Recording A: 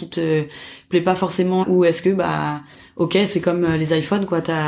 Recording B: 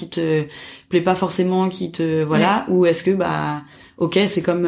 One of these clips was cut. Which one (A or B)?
A